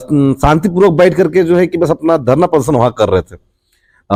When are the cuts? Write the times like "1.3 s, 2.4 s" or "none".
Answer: none